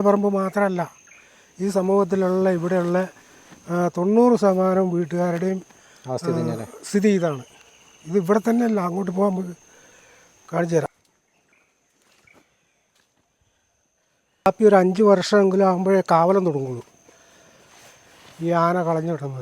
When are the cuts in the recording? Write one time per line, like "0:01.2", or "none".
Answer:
none